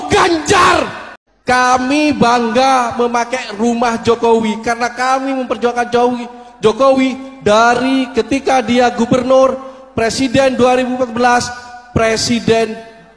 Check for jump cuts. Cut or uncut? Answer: cut